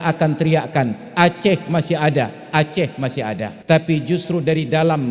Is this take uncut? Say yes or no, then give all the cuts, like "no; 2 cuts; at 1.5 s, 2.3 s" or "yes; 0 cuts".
no; 1 cut; at 3.5 s